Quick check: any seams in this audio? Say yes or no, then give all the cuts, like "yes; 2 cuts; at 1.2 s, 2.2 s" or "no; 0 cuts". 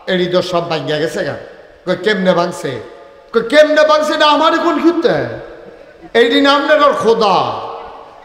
no; 0 cuts